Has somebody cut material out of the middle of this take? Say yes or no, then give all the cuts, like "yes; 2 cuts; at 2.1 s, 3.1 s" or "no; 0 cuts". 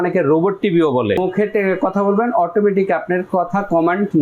yes; 1 cut; at 1.2 s